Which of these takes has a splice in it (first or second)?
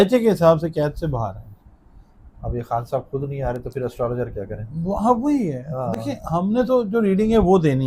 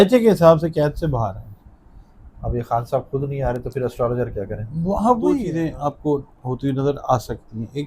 second